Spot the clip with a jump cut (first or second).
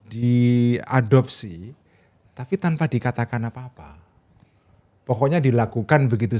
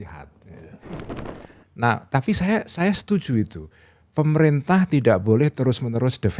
second